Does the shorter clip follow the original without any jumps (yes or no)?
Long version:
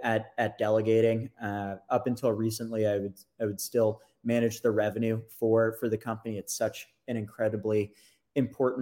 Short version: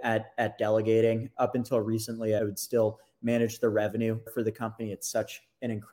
no